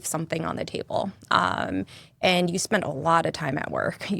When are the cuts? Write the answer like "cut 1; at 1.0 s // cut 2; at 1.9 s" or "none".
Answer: none